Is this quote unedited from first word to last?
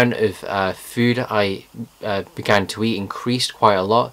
no; 1 cut; at 2.5 s

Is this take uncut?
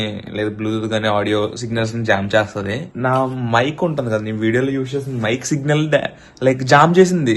no; 1 cut; at 2.9 s

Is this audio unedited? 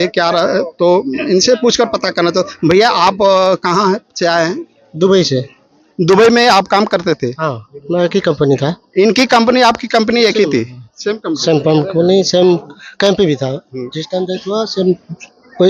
yes; 0 cuts

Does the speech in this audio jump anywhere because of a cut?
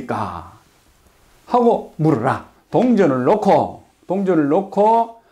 yes; 1 cut; at 2.5 s

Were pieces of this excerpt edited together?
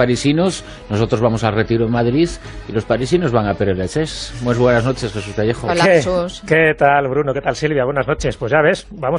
yes; 1 cut; at 7.0 s

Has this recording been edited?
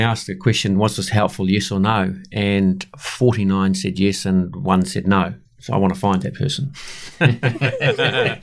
no; 0 cuts

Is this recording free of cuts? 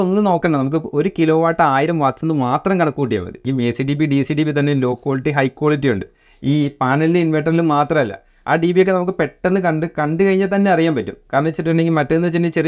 no; 1 cut; at 3.4 s

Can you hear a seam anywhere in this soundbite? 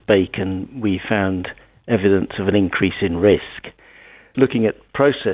yes; 1 cut; at 4.3 s

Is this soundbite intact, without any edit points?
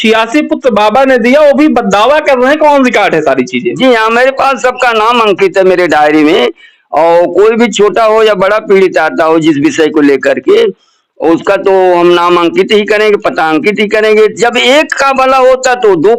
yes; 0 cuts

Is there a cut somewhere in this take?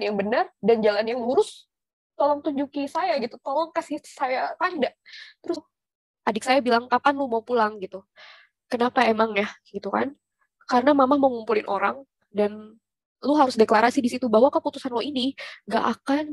yes; 1 cut; at 5.6 s

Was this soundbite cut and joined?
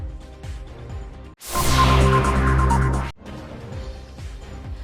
yes; 2 cuts; at 3.1 s, 4.1 s

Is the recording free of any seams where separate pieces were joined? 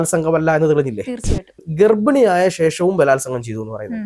no; 1 cut; at 1.5 s

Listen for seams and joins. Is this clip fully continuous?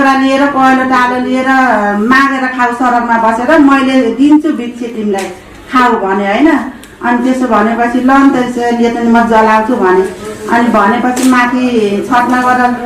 yes; 0 cuts

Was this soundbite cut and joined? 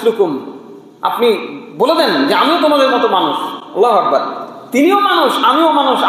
no; 0 cuts

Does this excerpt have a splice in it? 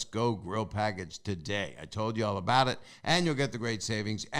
no; 0 cuts

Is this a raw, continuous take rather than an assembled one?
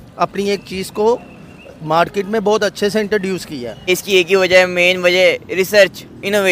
no; 1 cut; at 3.9 s

